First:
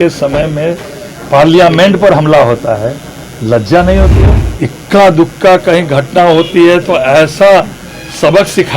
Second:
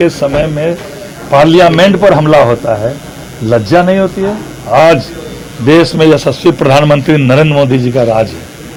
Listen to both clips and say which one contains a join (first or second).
first